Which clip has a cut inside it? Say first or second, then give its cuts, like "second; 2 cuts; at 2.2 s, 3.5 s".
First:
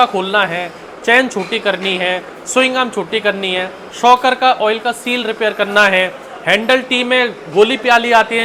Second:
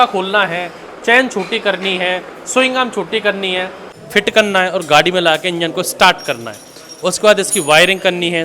second; 1 cut; at 3.8 s